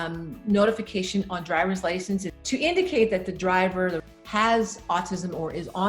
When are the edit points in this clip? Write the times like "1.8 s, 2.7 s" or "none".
2.3 s, 4.0 s